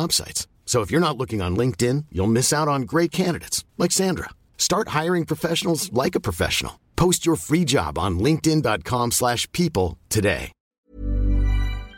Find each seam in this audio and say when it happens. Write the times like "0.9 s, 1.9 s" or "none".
10.7 s